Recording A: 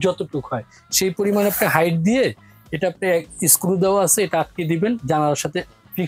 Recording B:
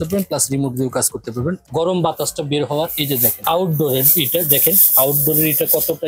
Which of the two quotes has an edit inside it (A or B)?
B